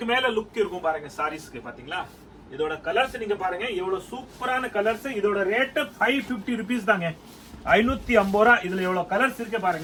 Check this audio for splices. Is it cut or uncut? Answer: uncut